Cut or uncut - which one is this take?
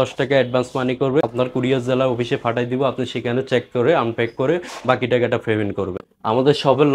cut